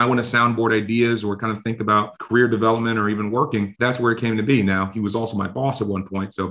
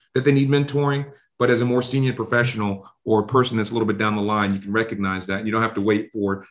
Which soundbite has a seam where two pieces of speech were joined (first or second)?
first